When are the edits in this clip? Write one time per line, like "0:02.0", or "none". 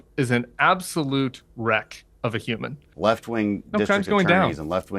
0:02.8